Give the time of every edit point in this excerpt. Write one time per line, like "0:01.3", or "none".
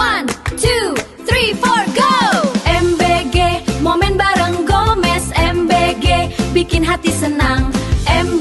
none